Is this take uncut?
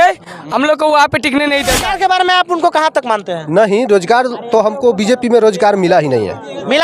no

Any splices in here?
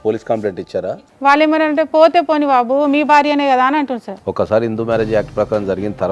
yes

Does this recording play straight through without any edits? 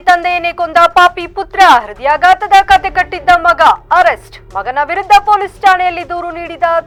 yes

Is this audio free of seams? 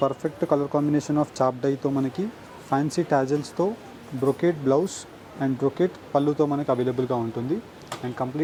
yes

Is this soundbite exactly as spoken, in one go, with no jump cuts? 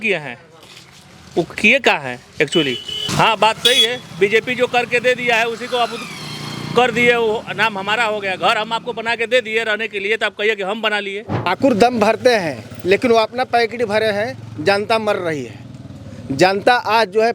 no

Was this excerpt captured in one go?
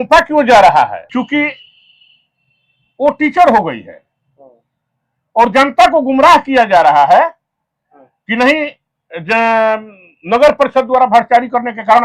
no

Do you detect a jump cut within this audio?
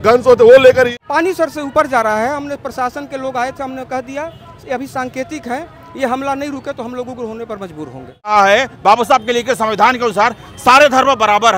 yes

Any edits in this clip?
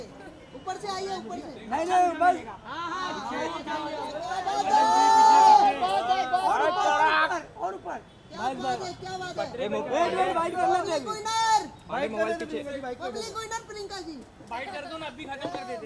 no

